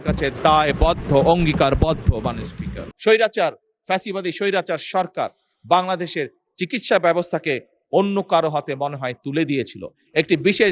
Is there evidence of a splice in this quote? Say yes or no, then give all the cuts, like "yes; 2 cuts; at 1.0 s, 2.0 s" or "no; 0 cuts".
yes; 1 cut; at 2.9 s